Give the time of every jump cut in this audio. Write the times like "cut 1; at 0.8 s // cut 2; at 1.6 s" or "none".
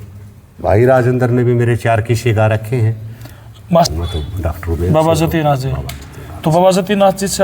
cut 1; at 3.9 s